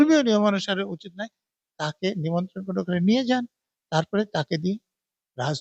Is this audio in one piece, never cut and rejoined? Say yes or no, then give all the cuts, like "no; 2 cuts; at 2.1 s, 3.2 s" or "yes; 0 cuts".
yes; 0 cuts